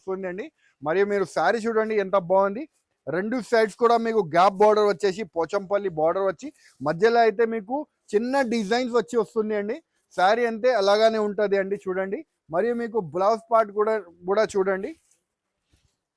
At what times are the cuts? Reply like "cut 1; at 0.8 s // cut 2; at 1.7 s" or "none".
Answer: none